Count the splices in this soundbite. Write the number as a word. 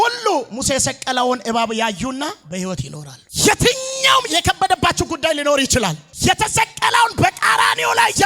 one